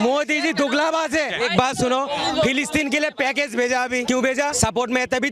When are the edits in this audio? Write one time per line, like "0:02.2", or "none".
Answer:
0:01.3
0:04.2